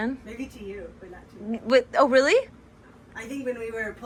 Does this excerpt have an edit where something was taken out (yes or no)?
no